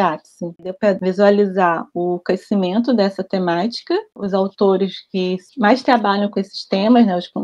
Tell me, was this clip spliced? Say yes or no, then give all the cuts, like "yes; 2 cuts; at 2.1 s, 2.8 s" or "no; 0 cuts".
yes; 2 cuts; at 0.9 s, 4.1 s